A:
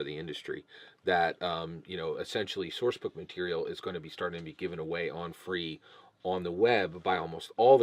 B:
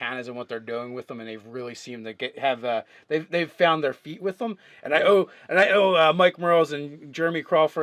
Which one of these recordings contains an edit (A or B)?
B